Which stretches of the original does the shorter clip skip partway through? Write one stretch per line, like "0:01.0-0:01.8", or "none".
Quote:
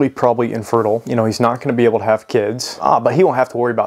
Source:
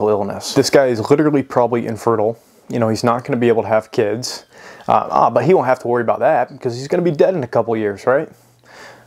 0:02.4-0:02.7
0:04.4-0:05.1